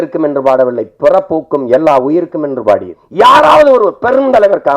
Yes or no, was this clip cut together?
yes